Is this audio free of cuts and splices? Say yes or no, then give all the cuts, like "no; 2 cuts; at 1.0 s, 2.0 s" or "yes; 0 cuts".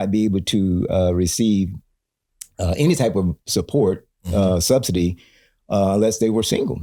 yes; 0 cuts